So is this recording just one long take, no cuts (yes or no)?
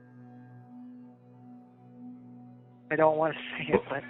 yes